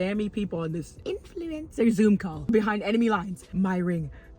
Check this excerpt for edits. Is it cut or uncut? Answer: cut